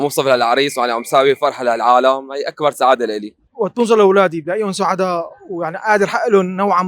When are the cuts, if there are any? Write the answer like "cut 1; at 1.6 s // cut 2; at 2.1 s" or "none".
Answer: cut 1; at 3.4 s